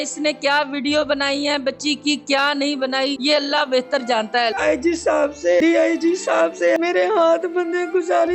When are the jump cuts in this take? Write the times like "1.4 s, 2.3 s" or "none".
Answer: 3.2 s, 4.5 s, 5.6 s, 6.8 s